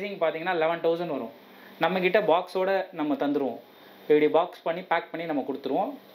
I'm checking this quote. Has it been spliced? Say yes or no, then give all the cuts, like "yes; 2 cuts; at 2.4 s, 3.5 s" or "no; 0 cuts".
no; 0 cuts